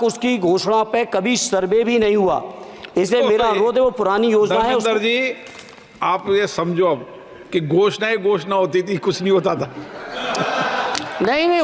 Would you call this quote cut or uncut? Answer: uncut